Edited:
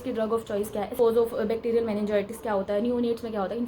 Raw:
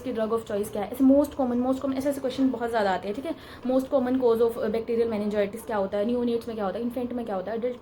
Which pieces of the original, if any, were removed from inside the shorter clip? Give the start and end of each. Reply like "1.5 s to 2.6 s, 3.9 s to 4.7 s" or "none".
1.0 s to 4.2 s